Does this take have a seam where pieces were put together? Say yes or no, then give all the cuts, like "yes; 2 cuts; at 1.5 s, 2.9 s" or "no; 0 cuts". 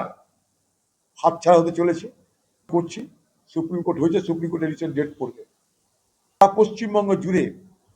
yes; 2 cuts; at 2.7 s, 6.4 s